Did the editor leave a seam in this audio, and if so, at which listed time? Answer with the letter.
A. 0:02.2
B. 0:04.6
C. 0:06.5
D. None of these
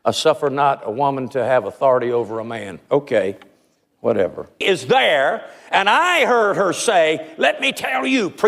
B